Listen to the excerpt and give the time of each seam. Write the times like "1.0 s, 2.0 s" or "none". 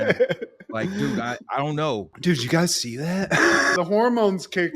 3.7 s